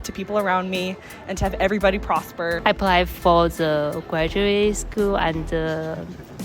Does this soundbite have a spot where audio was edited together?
yes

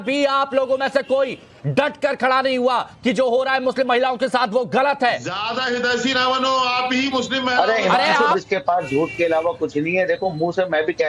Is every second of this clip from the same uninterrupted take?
no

